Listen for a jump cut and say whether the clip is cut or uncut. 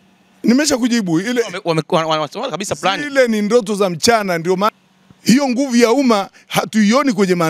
cut